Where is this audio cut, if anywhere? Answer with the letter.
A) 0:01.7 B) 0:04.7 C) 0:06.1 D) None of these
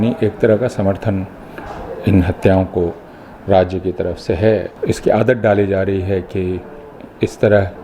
B